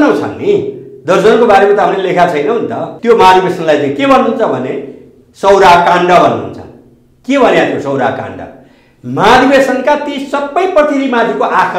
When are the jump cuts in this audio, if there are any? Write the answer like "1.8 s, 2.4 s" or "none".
2.9 s